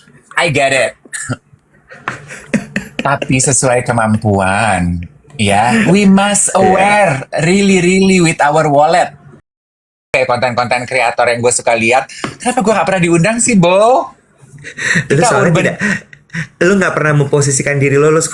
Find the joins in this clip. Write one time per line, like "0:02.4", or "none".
0:09.8

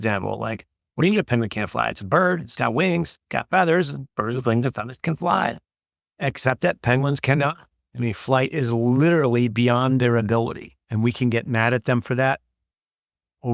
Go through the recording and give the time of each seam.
none

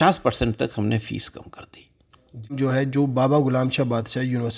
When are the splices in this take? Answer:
0:02.6

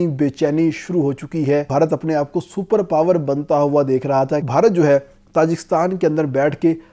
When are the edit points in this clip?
0:01.7
0:04.4

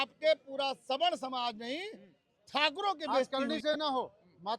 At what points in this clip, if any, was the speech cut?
0:03.3

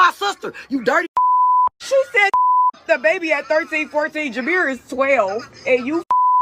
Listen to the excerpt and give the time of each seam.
0:01.8

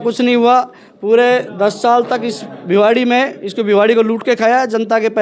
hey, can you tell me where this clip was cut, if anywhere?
none

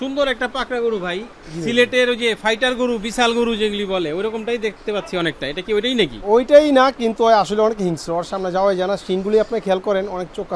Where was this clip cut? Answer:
none

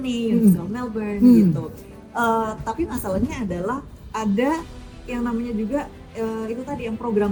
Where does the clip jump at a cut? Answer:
none

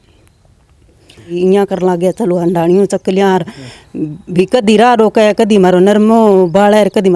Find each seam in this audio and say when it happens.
0:01.3

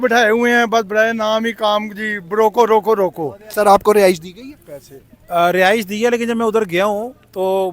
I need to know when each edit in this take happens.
0:03.5

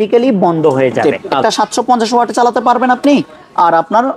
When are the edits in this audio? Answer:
0:01.3

